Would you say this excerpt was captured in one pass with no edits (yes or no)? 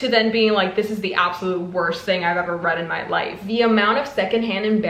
no